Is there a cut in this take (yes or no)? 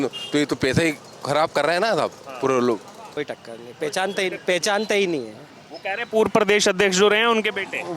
yes